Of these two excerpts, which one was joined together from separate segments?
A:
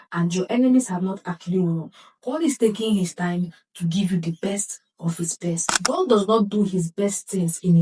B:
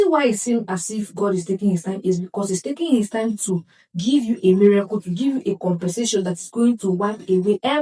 A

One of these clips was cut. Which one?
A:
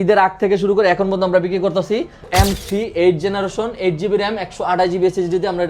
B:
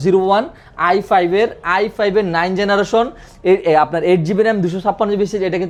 A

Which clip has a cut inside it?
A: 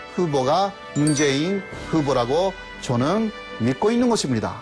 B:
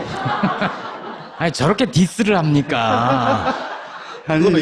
A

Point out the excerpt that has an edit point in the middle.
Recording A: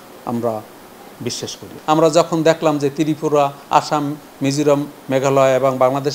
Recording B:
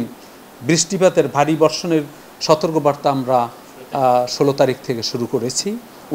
A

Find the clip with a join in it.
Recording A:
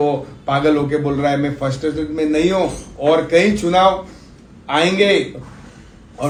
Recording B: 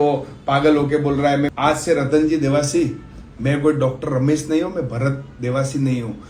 B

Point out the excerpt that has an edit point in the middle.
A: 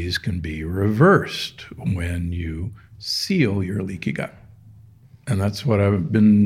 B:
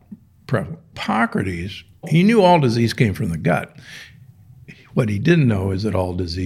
B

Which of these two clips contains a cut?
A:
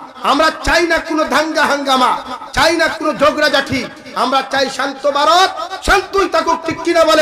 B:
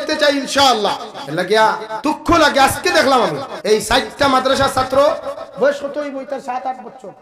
B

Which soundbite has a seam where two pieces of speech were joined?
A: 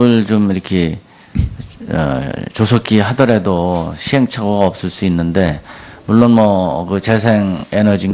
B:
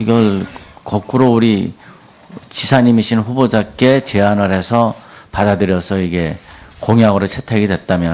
B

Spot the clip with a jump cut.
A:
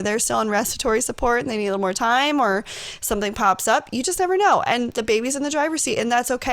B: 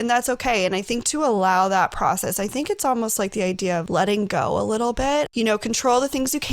B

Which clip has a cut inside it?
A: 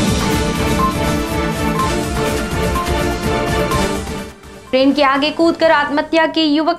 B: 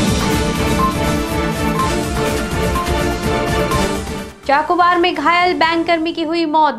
B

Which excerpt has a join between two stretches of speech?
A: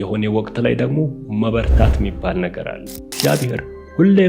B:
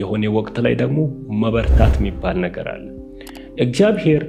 A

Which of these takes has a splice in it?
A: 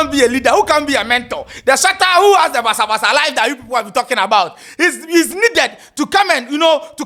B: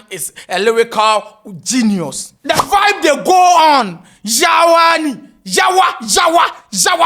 B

